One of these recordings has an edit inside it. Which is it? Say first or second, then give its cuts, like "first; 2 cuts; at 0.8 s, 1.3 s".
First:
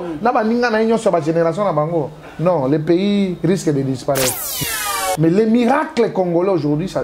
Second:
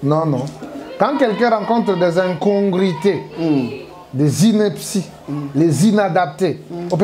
first; 1 cut; at 4.5 s